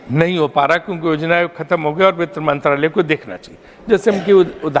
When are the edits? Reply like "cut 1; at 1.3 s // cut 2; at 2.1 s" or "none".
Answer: none